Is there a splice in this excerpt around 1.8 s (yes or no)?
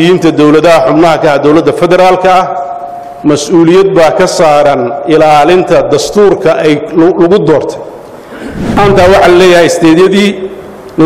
no